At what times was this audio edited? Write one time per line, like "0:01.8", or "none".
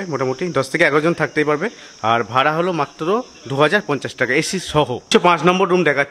0:05.0